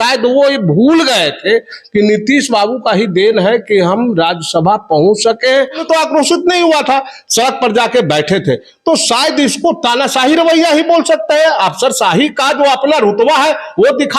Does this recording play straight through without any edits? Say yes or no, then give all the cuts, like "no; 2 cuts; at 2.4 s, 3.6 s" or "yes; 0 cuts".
no; 1 cut; at 5.8 s